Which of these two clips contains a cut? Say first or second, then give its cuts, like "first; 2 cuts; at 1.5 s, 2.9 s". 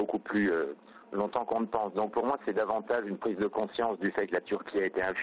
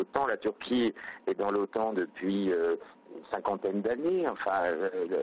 second; 1 cut; at 1.2 s